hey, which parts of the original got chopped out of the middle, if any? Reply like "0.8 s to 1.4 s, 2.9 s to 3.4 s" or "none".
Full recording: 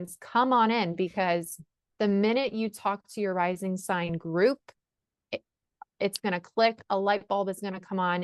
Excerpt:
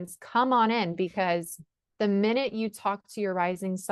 none

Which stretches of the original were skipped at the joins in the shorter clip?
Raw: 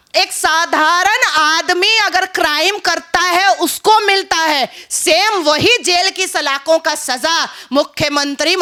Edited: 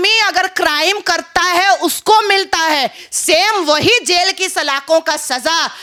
none

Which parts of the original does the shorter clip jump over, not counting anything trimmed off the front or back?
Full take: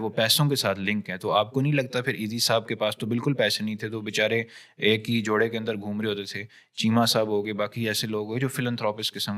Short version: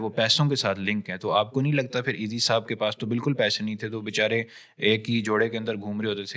none

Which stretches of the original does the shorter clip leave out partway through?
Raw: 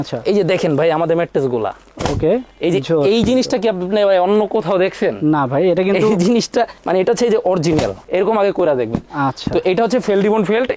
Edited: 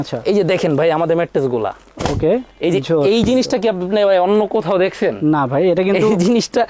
none

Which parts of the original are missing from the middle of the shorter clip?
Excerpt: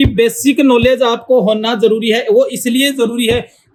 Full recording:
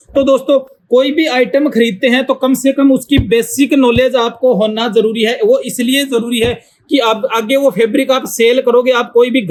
none

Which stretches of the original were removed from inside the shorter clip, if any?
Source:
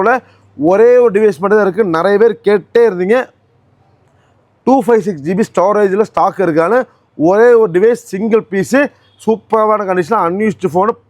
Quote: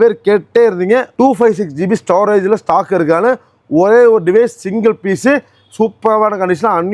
3.3 s to 4.6 s

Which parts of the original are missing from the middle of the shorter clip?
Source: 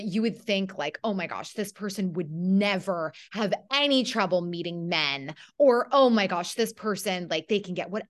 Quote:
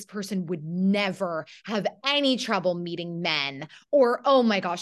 none

